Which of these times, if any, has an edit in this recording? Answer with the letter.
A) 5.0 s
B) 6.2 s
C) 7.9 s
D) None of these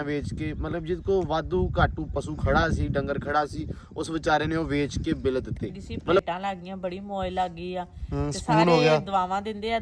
B